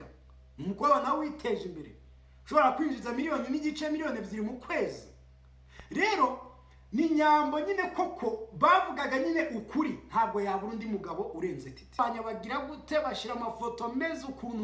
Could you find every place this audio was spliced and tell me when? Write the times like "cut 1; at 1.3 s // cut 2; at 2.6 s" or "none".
cut 1; at 12.0 s